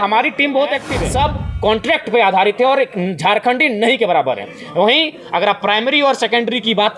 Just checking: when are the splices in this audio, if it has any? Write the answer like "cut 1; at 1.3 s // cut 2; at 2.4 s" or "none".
cut 1; at 0.9 s

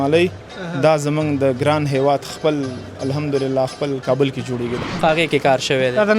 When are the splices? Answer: cut 1; at 4.8 s

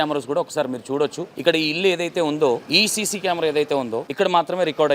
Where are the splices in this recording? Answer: cut 1; at 1.3 s // cut 2; at 2.7 s // cut 3; at 4.1 s

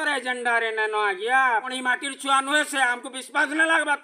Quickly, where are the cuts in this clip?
cut 1; at 1.7 s

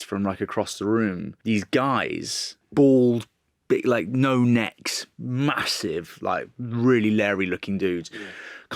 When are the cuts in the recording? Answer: cut 1; at 1.3 s // cut 2; at 2.6 s

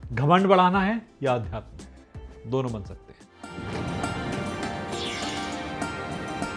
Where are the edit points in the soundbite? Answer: cut 1; at 3.5 s

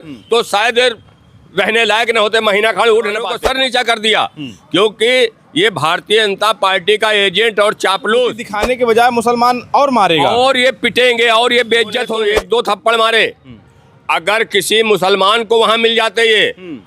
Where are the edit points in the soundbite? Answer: cut 1; at 3.3 s // cut 2; at 8.5 s // cut 3; at 12.1 s

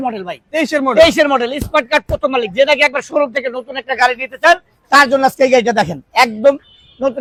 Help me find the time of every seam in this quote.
none

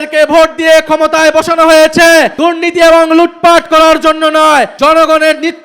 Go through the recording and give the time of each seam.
cut 1; at 2.3 s // cut 2; at 4.7 s

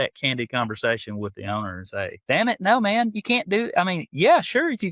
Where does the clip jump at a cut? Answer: cut 1; at 2.2 s

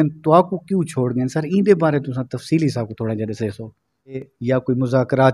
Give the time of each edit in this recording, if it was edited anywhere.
cut 1; at 4.3 s

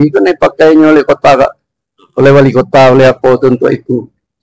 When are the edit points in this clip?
none

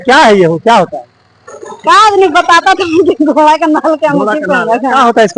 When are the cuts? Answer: none

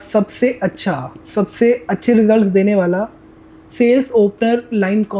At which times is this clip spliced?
none

